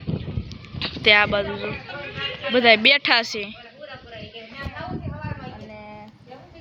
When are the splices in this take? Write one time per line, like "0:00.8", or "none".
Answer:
none